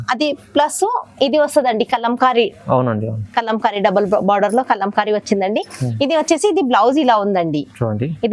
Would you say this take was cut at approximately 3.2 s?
no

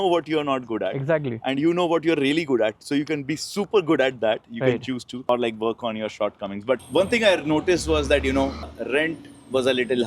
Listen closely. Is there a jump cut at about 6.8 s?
yes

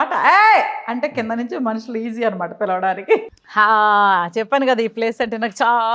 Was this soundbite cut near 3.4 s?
yes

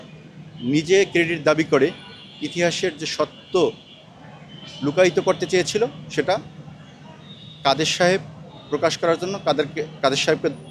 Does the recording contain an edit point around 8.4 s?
no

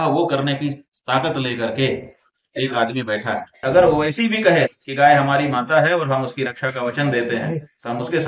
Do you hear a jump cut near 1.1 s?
no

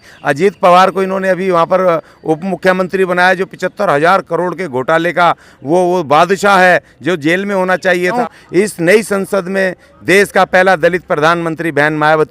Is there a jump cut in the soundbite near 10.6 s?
no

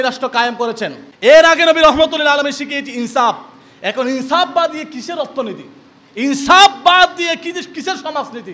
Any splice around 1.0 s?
yes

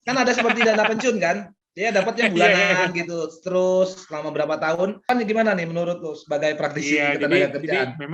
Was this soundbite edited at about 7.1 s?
no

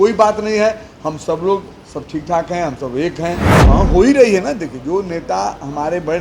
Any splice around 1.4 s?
no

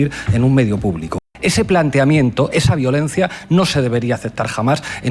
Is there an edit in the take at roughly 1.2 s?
yes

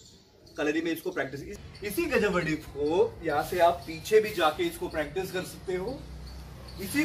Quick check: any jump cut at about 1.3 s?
no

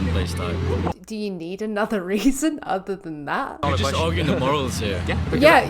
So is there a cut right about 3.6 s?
yes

